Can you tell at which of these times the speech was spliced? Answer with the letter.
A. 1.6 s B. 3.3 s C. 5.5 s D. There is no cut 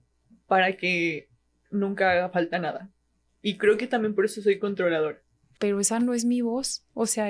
C